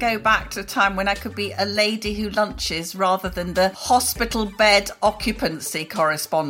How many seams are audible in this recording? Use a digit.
1